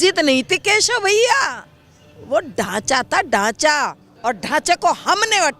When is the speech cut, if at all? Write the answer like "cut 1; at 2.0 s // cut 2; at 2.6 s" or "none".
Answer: cut 1; at 4.0 s